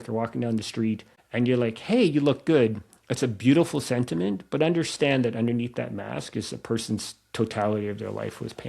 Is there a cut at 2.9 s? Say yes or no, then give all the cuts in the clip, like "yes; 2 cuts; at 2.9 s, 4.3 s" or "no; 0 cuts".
no; 1 cut; at 1.1 s